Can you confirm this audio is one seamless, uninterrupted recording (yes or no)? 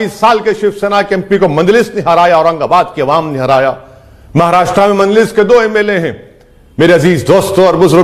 yes